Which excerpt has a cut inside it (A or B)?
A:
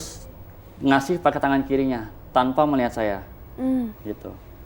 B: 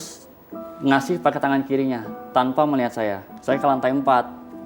B